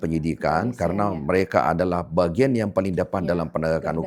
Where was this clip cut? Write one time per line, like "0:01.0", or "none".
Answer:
none